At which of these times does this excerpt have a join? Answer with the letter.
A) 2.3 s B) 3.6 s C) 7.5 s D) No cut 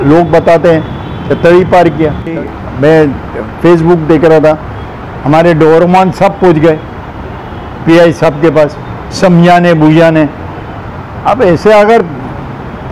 A